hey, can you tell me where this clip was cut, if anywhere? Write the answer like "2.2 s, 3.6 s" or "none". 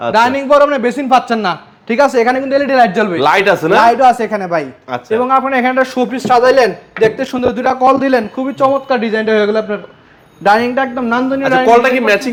none

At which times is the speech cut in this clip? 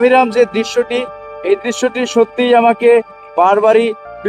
none

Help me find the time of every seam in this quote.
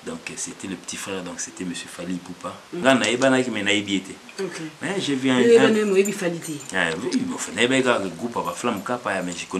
2.7 s

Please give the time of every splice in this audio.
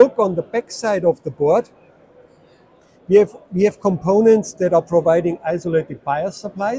none

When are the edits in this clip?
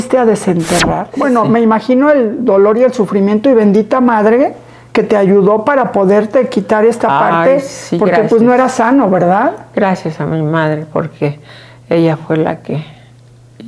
1.1 s

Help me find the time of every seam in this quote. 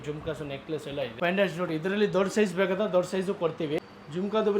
1.1 s, 3.8 s

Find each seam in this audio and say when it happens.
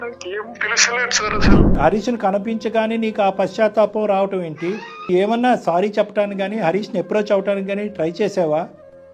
1.8 s, 5.1 s

